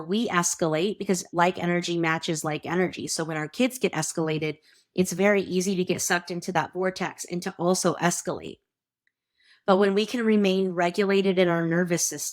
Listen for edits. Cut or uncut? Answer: cut